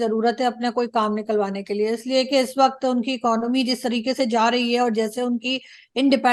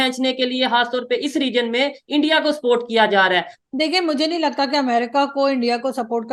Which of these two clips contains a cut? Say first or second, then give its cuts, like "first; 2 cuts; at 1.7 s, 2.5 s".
second; 1 cut; at 3.5 s